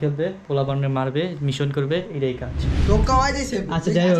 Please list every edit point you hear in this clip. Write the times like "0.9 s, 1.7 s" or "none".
2.8 s

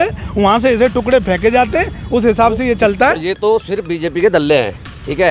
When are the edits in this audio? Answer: 3.2 s

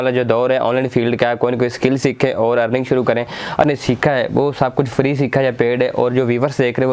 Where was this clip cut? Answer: 3.7 s

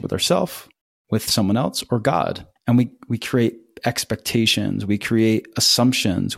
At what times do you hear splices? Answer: 2.5 s

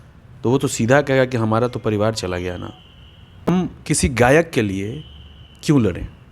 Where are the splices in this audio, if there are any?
3.5 s

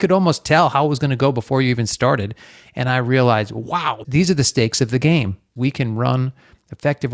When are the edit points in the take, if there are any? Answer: 4.0 s, 5.5 s

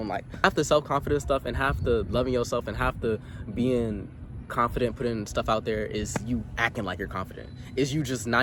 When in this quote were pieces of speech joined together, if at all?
none

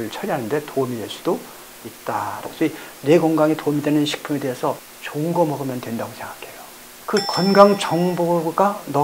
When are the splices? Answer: 2.5 s, 4.8 s

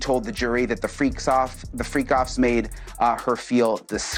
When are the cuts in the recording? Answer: none

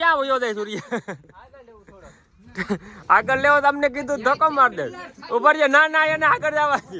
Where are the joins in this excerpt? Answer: none

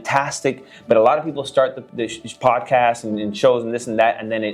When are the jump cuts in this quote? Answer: none

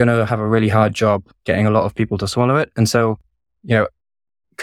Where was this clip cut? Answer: none

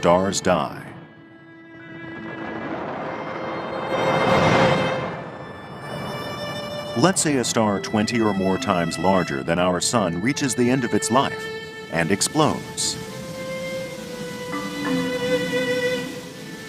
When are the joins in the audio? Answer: 1.4 s

